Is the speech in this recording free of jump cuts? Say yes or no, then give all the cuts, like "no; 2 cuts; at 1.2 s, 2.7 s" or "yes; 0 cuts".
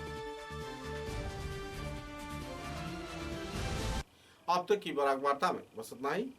yes; 0 cuts